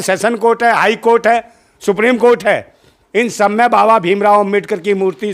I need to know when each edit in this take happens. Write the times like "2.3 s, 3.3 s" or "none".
none